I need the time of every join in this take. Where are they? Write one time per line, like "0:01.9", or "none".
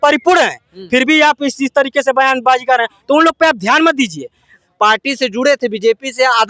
0:04.5